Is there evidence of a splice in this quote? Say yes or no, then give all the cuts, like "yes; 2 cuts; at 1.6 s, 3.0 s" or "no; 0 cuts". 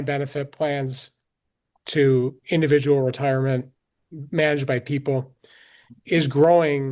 no; 0 cuts